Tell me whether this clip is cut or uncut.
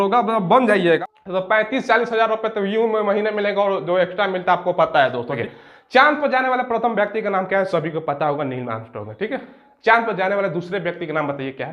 cut